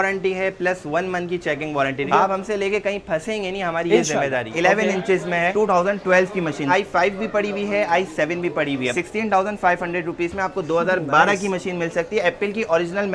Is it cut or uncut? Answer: cut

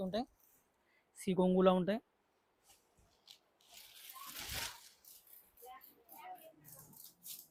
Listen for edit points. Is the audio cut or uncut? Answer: uncut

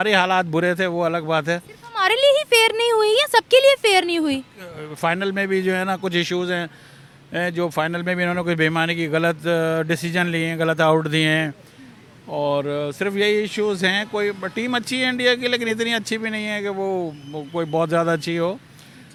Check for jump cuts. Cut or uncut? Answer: uncut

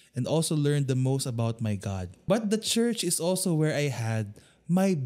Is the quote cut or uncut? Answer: cut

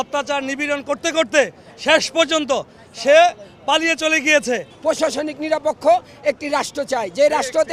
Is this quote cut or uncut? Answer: cut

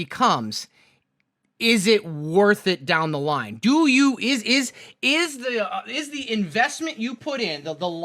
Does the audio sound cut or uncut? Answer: uncut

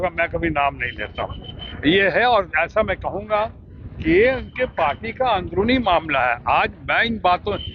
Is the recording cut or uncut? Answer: uncut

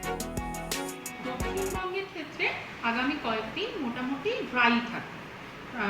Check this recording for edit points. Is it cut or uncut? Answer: cut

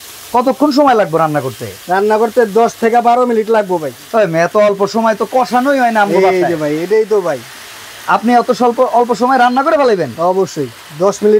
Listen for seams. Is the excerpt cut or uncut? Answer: uncut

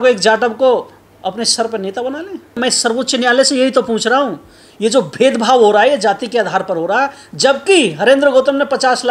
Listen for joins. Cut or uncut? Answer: cut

